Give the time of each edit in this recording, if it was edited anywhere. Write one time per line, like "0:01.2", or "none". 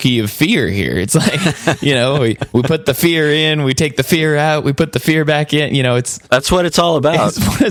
none